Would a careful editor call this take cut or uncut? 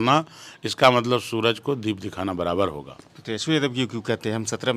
uncut